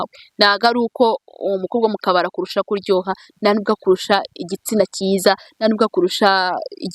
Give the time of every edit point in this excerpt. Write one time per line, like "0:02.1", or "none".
none